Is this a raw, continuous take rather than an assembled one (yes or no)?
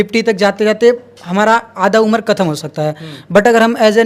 yes